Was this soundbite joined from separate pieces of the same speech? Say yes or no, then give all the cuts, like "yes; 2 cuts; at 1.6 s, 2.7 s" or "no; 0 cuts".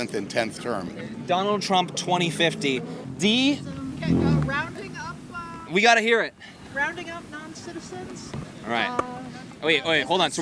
no; 0 cuts